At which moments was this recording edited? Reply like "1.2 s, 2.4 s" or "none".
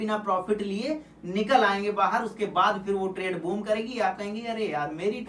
none